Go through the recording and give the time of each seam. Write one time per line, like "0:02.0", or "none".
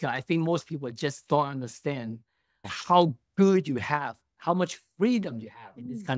0:02.7